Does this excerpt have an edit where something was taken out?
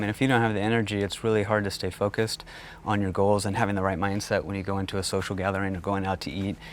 no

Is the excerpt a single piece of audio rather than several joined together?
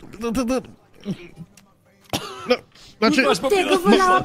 yes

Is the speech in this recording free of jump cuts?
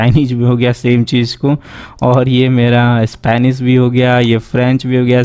yes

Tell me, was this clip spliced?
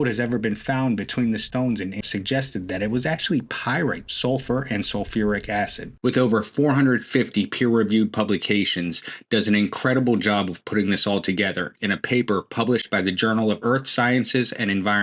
yes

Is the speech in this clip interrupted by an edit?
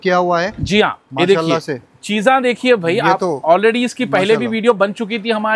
no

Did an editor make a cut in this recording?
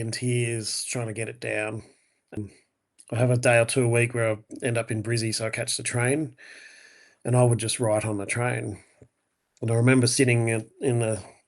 yes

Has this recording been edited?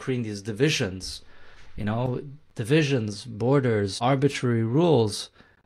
yes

